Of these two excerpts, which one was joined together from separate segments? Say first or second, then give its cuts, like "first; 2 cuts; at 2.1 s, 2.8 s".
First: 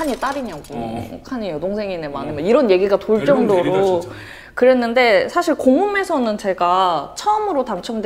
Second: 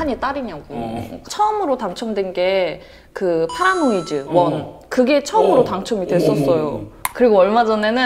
second; 2 cuts; at 1.2 s, 7.0 s